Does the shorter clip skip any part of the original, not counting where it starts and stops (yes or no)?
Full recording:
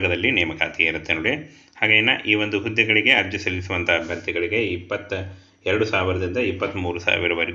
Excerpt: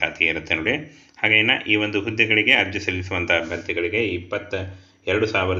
no